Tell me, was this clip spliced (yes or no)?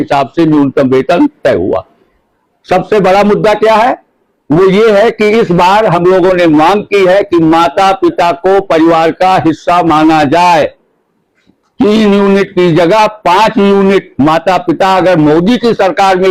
no